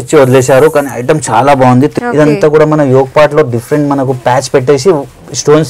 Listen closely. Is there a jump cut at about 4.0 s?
no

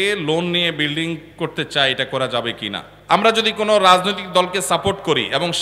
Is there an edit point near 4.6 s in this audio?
no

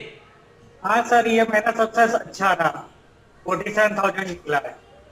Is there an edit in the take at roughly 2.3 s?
no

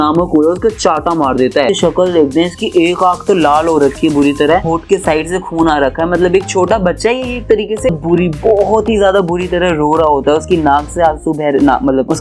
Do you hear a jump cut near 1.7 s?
yes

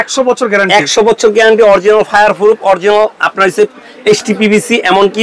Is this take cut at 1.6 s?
no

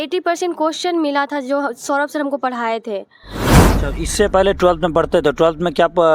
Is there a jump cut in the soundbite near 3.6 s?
yes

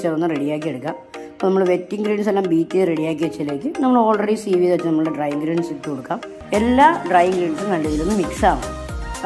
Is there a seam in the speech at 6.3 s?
yes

